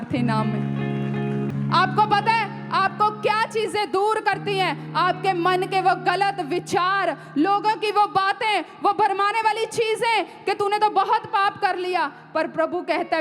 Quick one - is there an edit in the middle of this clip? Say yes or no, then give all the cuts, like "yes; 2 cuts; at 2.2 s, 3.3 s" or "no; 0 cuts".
yes; 1 cut; at 1.5 s